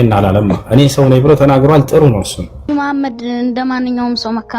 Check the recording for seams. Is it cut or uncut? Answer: cut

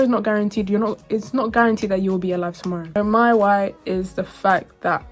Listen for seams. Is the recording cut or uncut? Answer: cut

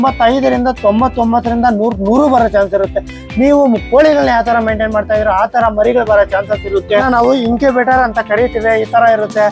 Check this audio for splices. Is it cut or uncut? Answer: cut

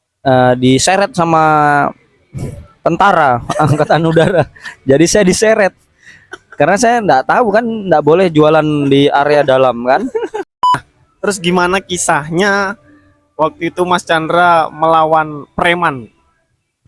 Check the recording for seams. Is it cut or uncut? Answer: cut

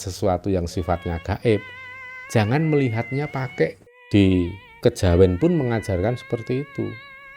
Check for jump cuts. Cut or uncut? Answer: cut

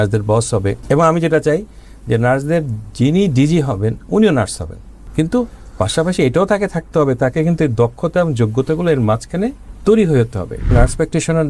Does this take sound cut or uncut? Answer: cut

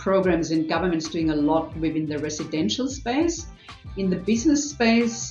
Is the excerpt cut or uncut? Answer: uncut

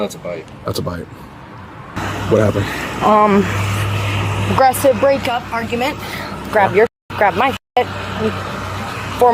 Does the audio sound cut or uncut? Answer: cut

